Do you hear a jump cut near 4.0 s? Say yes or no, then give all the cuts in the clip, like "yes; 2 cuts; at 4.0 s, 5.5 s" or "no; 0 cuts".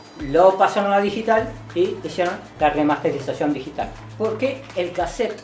yes; 1 cut; at 4.0 s